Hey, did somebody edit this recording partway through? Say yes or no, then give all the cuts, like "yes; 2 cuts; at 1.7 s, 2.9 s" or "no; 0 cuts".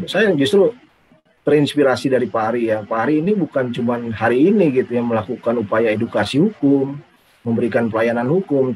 no; 0 cuts